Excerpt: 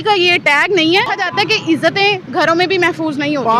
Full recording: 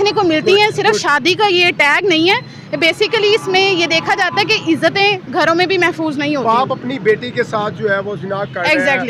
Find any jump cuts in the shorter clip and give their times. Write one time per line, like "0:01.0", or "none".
0:01.2